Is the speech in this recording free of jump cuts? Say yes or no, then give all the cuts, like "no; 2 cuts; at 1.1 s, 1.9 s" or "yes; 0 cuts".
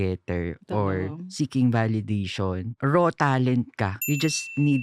no; 2 cuts; at 2.7 s, 4.0 s